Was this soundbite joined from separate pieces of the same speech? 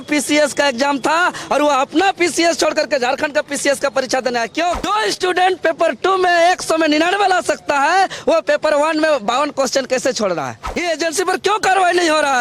yes; 2 cuts; at 4.8 s, 10.7 s

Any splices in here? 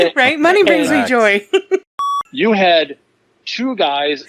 yes; 1 cut; at 2.0 s

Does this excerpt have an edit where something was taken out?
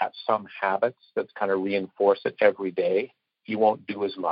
yes; 1 cut; at 3.3 s

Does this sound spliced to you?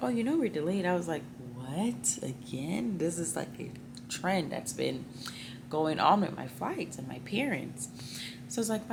no; 0 cuts

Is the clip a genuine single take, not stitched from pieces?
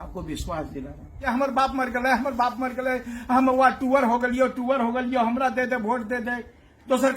no; 1 cut; at 1.3 s

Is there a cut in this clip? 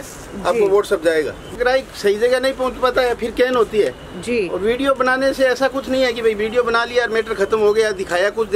yes; 1 cut; at 1.5 s

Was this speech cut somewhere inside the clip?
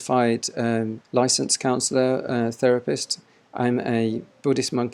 yes; 2 cuts; at 1.0 s, 3.4 s

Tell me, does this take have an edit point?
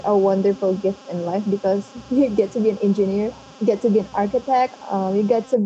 yes; 1 cut; at 1.9 s

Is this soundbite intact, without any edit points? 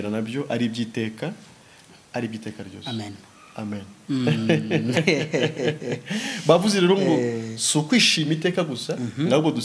yes; 0 cuts

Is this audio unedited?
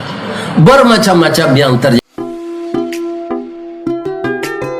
no; 1 cut; at 2.0 s

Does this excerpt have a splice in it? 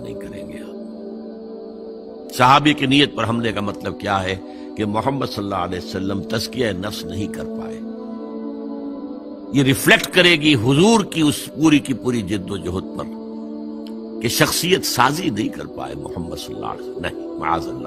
no; 0 cuts

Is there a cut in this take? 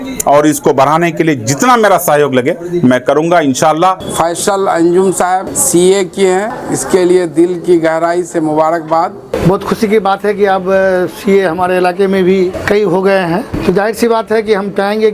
yes; 6 cuts; at 4.0 s, 5.6 s, 6.6 s, 9.3 s, 12.6 s, 13.5 s

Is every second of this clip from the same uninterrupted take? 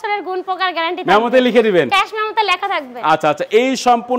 yes; 0 cuts

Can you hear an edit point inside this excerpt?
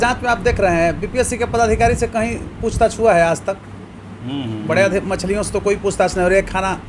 no; 0 cuts

